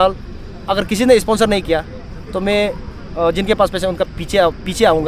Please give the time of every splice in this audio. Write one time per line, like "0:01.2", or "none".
none